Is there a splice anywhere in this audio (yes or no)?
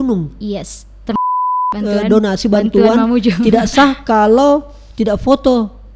yes